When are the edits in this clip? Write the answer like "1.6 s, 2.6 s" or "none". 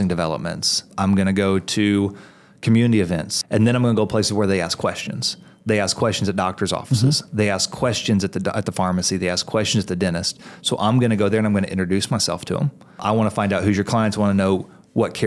0.9 s, 3.3 s, 13.0 s

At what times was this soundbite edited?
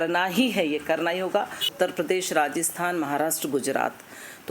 1.6 s

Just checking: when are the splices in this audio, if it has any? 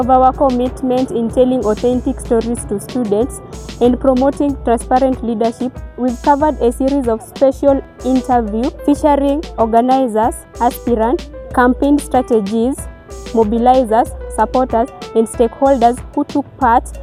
none

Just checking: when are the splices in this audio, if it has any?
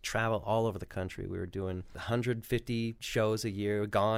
1.9 s, 3.0 s

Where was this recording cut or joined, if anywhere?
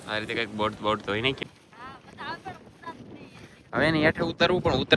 1.4 s

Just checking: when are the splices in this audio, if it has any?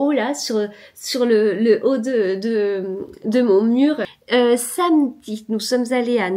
4.1 s

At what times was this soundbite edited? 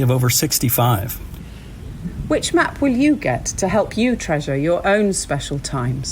1.5 s

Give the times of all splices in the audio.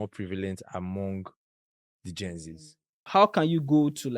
3.0 s

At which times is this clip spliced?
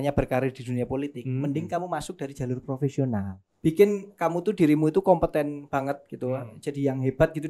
3.4 s

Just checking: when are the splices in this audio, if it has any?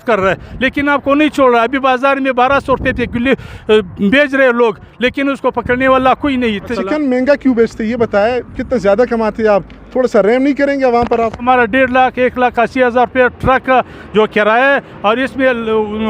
6.7 s, 11.4 s

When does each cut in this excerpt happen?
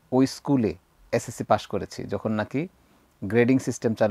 0.9 s

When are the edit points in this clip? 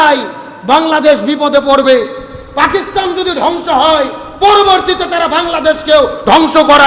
none

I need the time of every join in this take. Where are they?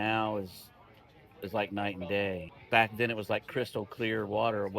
2.5 s

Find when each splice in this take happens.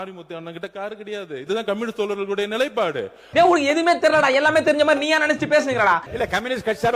none

